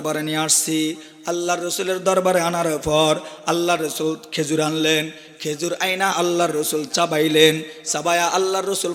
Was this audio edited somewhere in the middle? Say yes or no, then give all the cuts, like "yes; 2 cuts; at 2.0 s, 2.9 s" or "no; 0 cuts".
no; 0 cuts